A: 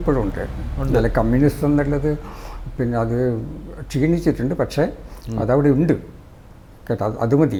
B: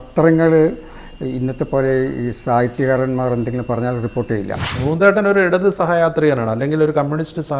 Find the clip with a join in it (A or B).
B